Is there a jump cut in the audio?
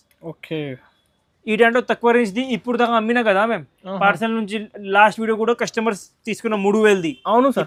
no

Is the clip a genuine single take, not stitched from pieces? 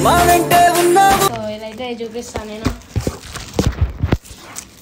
yes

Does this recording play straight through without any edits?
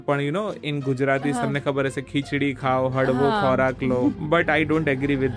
no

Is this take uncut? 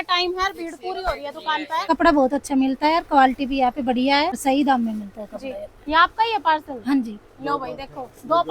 no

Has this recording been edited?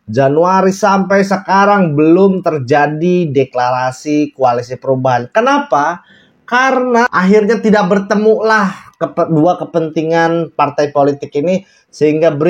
yes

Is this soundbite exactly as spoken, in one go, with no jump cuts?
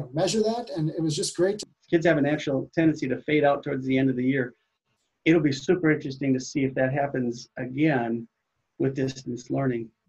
no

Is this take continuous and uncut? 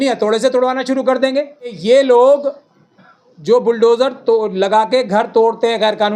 no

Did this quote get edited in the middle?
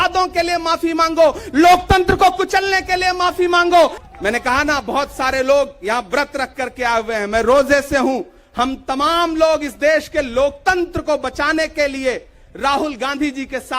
yes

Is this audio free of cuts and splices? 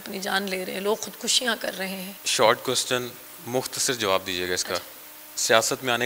no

